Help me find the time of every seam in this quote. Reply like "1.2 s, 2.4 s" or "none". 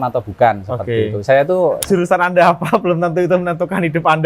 1.8 s